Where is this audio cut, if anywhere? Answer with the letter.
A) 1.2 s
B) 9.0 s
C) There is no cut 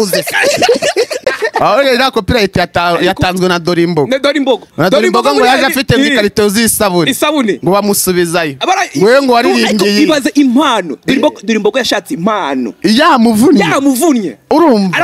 A